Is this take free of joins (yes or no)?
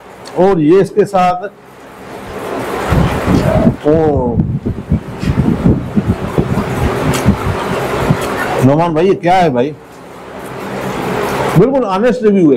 yes